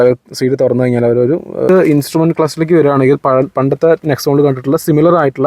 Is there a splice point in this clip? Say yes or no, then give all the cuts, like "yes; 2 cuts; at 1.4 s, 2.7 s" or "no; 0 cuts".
yes; 1 cut; at 1.7 s